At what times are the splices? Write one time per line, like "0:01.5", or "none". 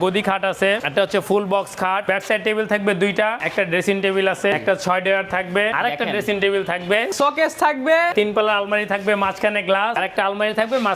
0:00.8
0:02.0
0:03.4
0:04.6
0:05.7
0:07.1
0:08.1
0:10.0